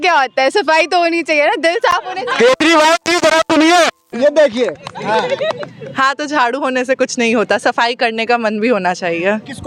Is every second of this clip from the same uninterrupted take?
yes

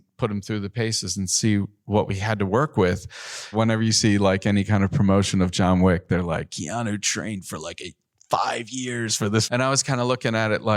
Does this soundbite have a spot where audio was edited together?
yes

